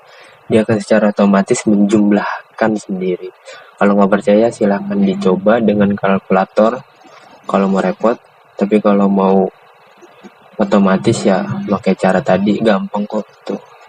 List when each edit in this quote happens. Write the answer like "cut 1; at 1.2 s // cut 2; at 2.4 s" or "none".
none